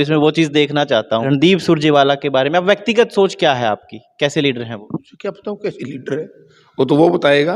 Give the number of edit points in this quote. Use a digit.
2